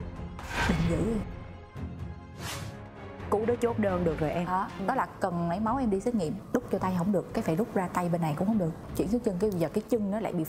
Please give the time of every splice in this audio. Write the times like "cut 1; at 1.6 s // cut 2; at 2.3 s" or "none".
cut 1; at 2.4 s // cut 2; at 4.8 s // cut 3; at 6.4 s // cut 4; at 8.8 s